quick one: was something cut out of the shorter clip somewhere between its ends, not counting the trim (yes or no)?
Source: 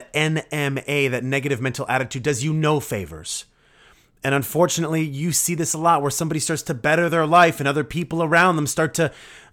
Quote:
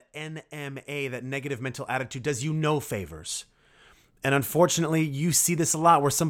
no